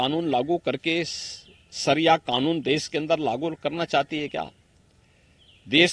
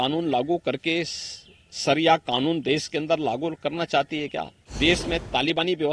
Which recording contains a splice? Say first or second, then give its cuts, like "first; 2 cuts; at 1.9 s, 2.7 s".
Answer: second; 1 cut; at 4.6 s